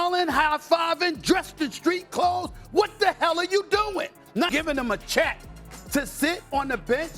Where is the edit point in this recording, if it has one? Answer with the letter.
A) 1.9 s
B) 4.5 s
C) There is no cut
B